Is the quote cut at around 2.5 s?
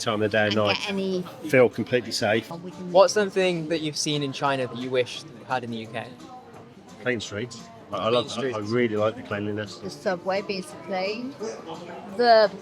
yes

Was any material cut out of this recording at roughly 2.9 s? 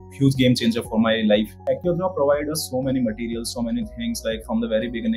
no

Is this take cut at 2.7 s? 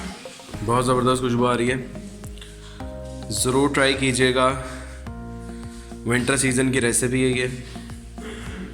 no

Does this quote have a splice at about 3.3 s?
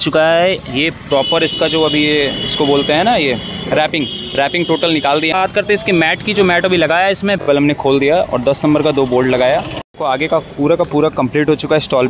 no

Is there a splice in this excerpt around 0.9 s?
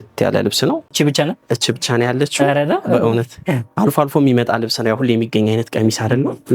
yes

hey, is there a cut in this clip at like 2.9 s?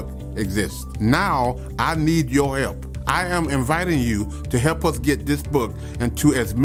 no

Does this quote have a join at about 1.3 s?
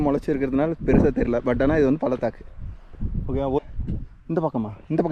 no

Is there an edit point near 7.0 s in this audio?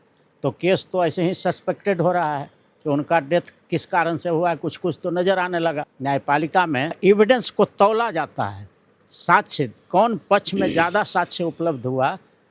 yes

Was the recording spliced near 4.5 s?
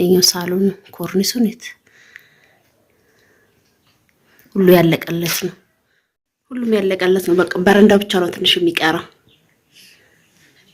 no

